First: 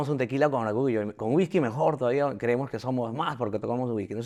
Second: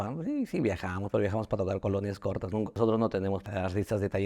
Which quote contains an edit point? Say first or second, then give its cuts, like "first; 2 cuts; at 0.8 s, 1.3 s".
second; 2 cuts; at 2.7 s, 3.5 s